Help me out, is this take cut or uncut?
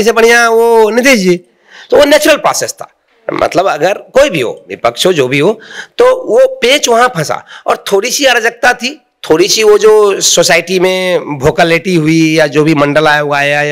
uncut